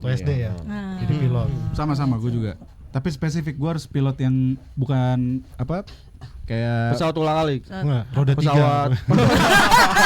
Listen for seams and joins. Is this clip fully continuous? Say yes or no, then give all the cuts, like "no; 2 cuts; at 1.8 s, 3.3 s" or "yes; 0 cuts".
yes; 0 cuts